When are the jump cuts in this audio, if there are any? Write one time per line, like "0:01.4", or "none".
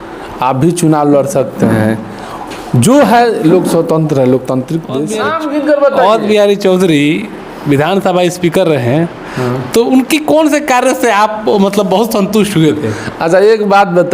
0:05.0